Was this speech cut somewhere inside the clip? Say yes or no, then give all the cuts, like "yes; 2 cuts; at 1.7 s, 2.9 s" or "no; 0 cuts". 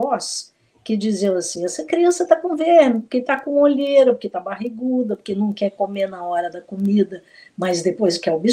no; 0 cuts